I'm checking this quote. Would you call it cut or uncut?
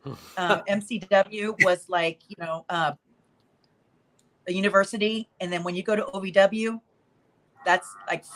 uncut